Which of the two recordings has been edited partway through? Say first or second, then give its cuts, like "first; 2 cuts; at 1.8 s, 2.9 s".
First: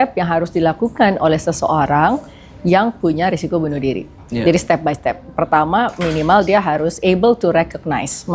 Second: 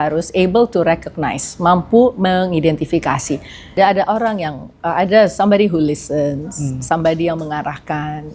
second; 1 cut; at 3.7 s